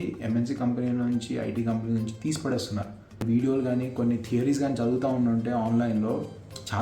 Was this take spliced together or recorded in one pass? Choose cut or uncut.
cut